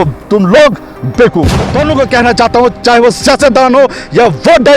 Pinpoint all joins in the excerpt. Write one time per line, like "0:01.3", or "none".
0:01.3

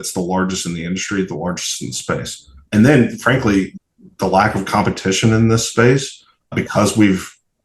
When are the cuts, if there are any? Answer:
0:02.6
0:03.8
0:06.5

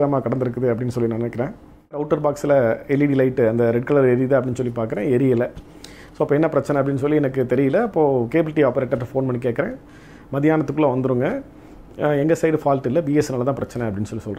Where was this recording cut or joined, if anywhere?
0:02.0

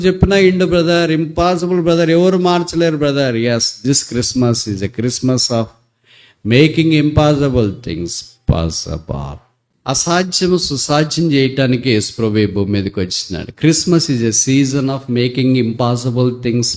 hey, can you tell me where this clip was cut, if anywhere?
0:09.7

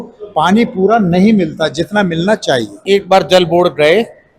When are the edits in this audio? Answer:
0:02.8

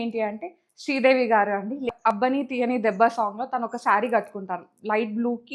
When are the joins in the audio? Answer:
0:02.2

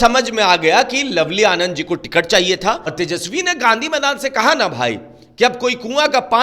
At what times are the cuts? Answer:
0:02.9

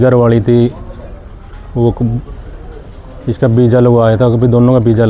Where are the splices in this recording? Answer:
none

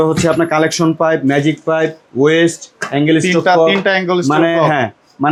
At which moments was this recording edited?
none

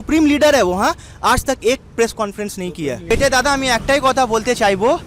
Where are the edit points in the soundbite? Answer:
0:03.1

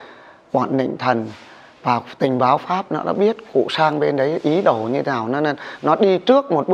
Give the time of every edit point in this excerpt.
none

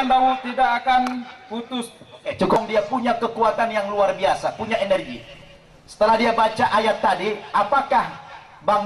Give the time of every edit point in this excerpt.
0:02.6

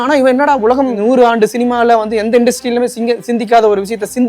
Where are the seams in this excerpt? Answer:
0:01.0

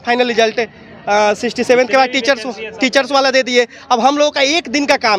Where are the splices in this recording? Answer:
none

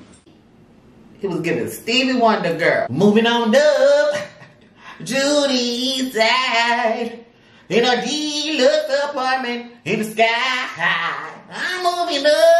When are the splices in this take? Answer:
0:02.9

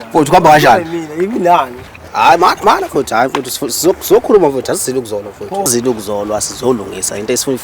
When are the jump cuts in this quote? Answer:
0:05.7

